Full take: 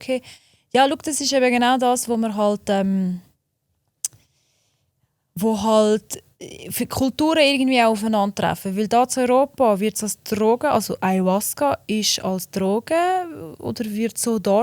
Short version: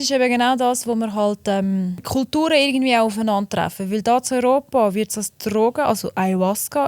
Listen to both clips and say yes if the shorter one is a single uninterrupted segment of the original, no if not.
no